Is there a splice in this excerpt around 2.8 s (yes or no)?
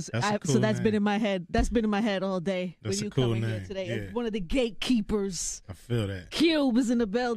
no